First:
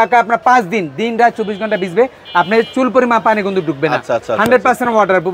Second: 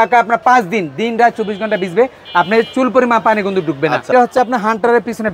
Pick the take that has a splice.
second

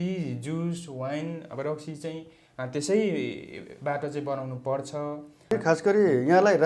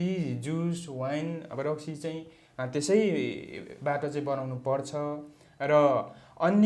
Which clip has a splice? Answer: first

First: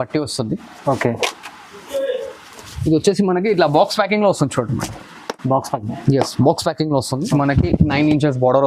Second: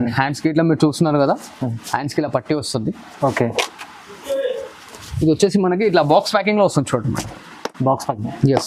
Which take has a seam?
first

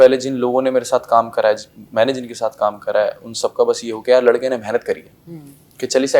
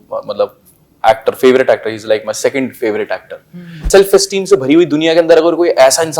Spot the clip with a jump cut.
second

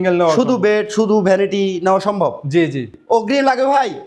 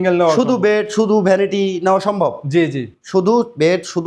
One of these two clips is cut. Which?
first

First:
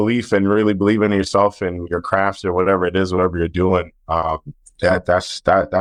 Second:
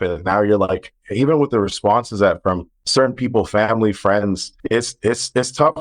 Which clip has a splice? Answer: second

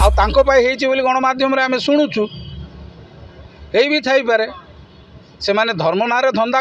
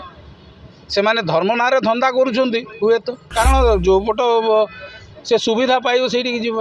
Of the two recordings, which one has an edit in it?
second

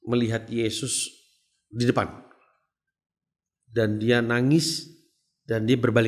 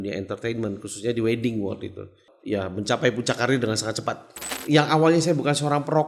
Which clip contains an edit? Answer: second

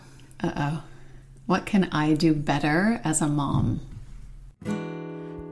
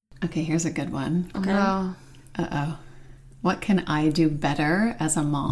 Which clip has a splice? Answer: first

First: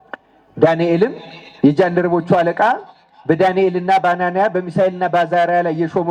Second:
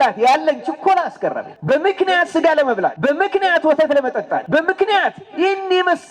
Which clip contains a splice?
second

